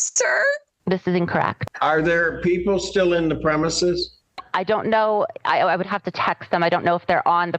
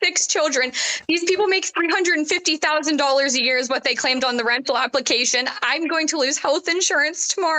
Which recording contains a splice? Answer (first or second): first